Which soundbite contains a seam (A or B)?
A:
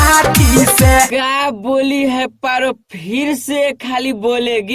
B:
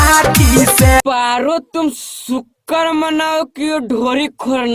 B